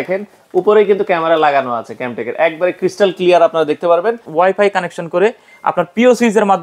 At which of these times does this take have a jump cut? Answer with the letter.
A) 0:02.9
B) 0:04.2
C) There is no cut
B